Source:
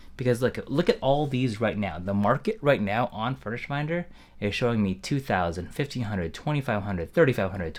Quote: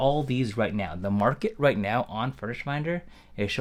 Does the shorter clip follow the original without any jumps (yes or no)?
yes